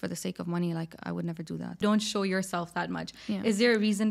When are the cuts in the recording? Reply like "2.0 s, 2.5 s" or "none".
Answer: 1.8 s